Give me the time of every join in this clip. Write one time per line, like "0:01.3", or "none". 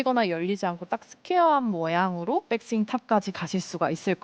0:02.5